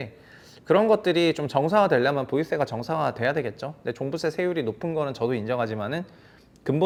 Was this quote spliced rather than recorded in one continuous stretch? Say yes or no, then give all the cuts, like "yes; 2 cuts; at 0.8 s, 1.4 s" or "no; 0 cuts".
no; 0 cuts